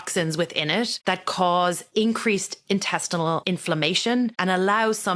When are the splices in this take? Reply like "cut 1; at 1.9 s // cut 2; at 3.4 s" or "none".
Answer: cut 1; at 1.0 s // cut 2; at 1.8 s // cut 3; at 3.4 s // cut 4; at 4.4 s